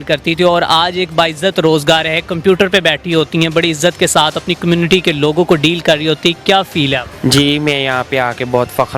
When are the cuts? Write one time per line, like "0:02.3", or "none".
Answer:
0:07.1